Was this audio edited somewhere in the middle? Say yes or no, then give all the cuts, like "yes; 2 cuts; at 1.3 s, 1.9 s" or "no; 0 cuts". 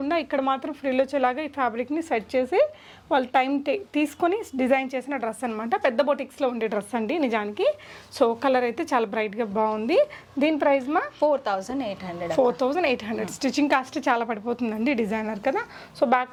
no; 0 cuts